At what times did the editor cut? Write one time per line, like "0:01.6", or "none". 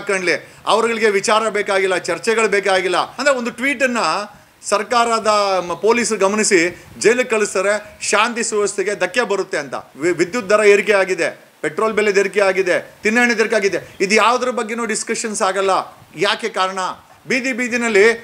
0:03.1
0:09.8
0:17.1